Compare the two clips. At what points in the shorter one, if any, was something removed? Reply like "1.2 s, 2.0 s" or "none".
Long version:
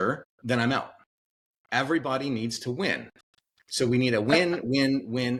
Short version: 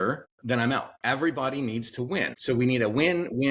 0.9 s, 2.3 s

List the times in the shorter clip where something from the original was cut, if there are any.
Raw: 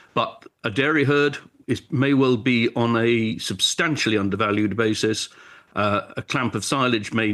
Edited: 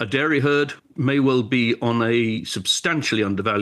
0.9 s

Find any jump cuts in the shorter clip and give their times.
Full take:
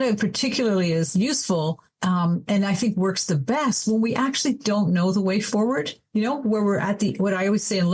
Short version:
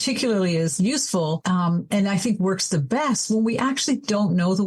1.4 s

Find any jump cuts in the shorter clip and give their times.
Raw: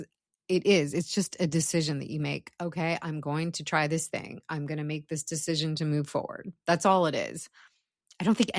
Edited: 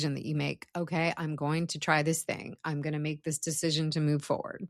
none

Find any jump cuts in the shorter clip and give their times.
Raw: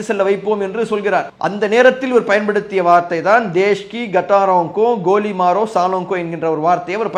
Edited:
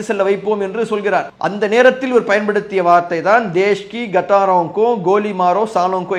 none

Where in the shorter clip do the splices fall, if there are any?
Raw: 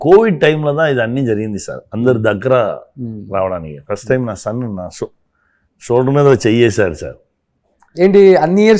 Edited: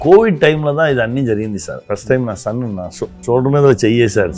1.8 s, 3.2 s

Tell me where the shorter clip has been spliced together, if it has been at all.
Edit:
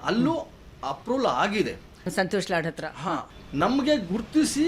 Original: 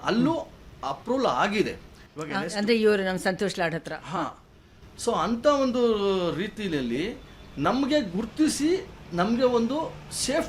2.1 s, 3.3 s

